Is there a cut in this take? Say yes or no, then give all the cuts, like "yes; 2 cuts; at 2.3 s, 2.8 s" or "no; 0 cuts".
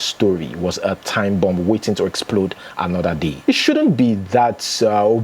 yes; 1 cut; at 3.4 s